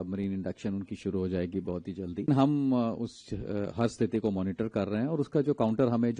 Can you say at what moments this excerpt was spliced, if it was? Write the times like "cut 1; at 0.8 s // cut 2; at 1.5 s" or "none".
cut 1; at 2.3 s